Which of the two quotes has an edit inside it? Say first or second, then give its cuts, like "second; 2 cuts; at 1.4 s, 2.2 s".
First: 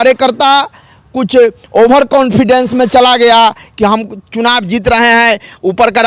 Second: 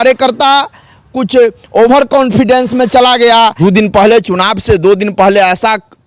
second; 1 cut; at 3.6 s